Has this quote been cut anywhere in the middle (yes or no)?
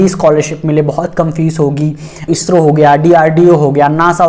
yes